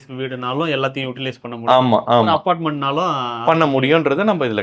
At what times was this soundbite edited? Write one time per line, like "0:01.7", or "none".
none